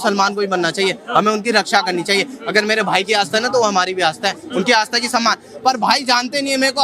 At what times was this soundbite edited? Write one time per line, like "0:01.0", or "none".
none